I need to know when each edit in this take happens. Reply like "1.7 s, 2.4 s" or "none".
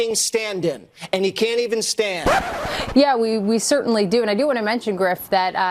2.4 s